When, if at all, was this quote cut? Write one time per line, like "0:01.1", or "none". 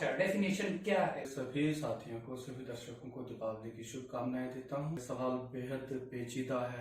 0:01.3
0:05.0